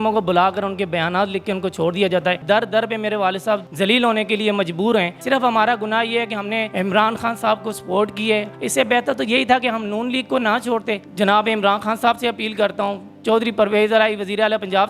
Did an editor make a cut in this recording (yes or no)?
yes